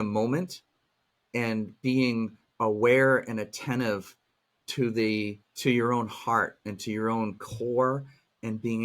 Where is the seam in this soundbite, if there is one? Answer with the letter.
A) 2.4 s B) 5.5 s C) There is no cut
B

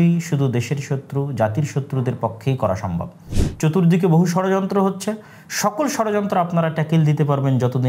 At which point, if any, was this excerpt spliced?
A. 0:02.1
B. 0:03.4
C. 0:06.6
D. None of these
B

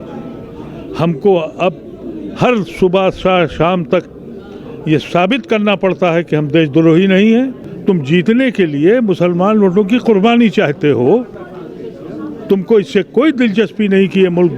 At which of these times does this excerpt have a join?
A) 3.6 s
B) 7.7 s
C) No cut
B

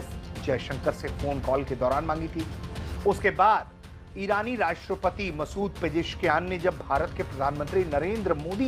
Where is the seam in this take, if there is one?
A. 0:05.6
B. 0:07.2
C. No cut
C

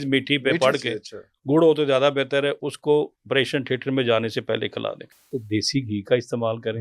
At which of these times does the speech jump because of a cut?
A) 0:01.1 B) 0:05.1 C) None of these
B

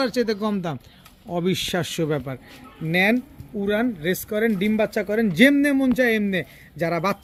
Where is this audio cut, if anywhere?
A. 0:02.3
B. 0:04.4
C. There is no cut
C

